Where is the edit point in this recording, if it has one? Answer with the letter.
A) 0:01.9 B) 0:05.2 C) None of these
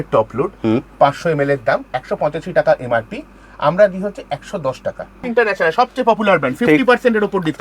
B